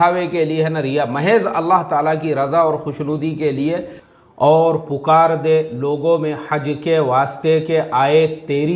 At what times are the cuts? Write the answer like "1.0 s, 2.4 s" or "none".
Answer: 4.0 s